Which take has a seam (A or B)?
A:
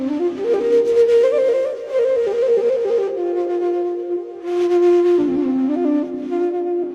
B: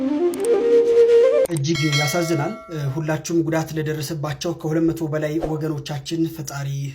B